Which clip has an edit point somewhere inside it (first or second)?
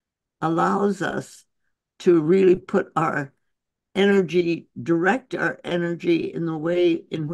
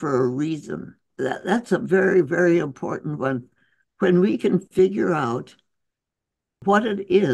second